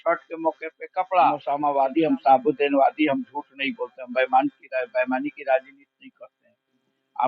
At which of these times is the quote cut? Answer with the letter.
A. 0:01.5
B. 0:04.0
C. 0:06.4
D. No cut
A